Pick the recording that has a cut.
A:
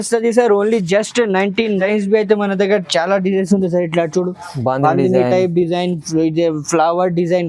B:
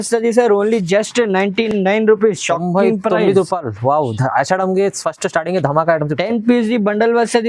A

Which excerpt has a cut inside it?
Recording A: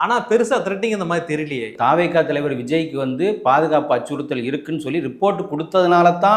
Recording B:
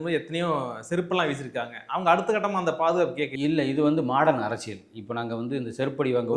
A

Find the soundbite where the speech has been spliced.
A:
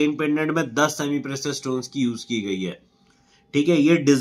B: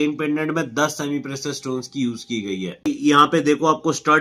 B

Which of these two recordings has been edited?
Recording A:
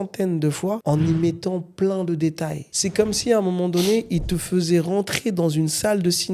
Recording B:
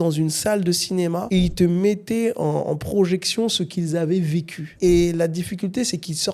A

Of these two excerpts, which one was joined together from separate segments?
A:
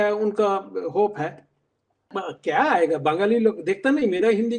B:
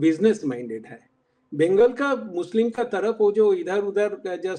A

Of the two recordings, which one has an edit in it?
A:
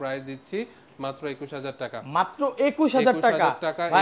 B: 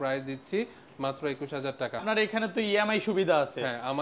B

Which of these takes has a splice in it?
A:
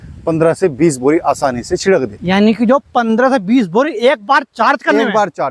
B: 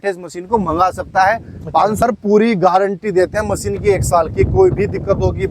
B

